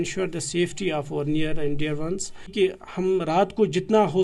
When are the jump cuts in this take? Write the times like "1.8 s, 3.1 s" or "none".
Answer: 2.5 s